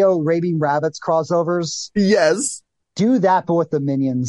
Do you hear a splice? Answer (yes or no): no